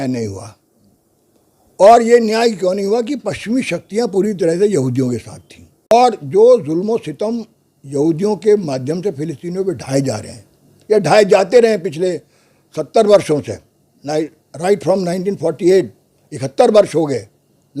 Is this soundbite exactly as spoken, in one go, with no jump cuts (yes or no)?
no